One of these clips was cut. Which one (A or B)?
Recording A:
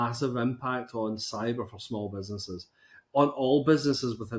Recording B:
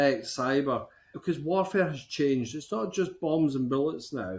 B